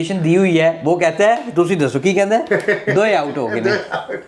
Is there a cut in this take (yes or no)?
no